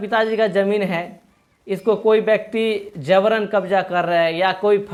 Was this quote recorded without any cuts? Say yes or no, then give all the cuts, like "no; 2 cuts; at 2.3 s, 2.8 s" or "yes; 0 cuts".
yes; 0 cuts